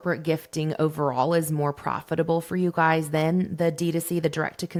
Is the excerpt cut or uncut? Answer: uncut